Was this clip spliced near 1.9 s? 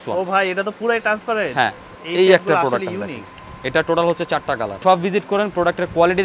yes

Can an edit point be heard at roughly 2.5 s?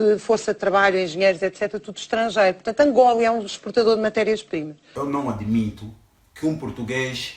no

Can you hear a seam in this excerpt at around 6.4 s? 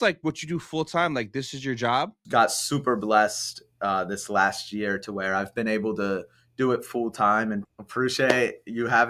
no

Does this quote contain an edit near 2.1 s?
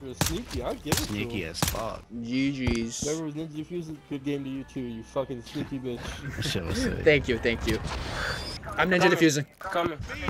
yes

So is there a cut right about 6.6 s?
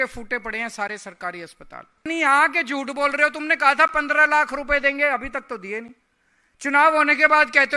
no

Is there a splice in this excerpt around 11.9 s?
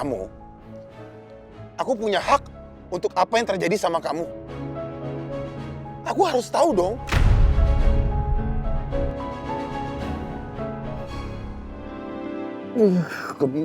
yes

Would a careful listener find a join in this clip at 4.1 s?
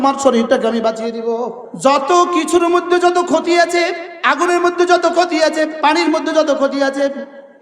yes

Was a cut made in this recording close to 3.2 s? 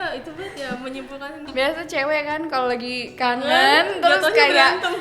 no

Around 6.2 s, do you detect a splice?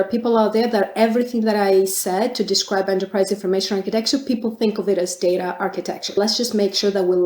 yes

